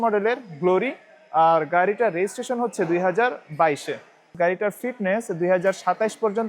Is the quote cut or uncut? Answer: cut